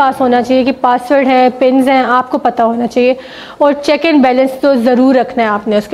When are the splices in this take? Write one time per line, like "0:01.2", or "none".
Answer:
none